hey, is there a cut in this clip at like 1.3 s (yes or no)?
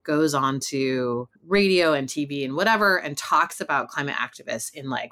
yes